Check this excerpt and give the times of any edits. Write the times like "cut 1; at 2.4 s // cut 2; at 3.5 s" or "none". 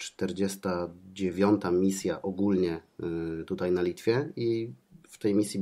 none